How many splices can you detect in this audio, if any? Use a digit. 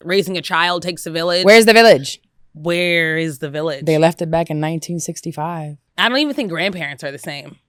0